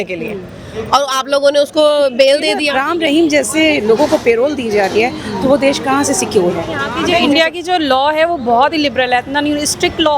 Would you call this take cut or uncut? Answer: cut